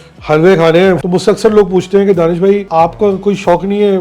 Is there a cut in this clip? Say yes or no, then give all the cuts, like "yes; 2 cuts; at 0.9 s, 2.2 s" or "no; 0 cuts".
yes; 2 cuts; at 1.0 s, 2.6 s